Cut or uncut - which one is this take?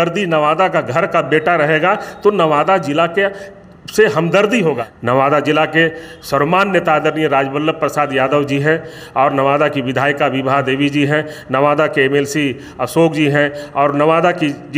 cut